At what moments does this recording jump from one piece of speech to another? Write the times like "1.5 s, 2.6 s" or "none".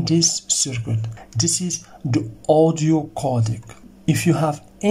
1.1 s, 3.9 s